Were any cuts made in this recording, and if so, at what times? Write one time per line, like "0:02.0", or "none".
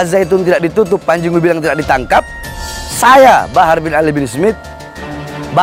none